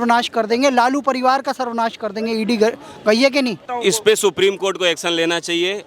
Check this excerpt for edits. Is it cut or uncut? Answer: cut